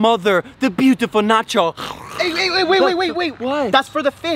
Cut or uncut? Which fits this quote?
uncut